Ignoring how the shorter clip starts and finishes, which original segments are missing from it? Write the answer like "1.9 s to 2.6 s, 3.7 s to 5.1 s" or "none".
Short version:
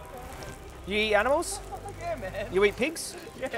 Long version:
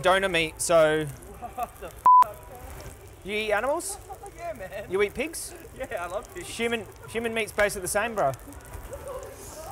none